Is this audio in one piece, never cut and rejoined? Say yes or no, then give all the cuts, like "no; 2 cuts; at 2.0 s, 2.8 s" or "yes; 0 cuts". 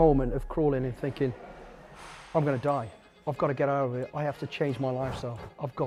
yes; 0 cuts